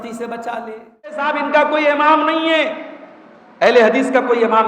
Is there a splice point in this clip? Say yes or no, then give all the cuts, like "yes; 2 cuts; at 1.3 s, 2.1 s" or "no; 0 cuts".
yes; 1 cut; at 1.3 s